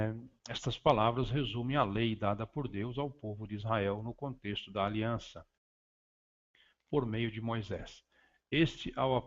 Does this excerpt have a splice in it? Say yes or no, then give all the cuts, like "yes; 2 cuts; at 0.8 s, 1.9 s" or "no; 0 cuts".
yes; 1 cut; at 1.8 s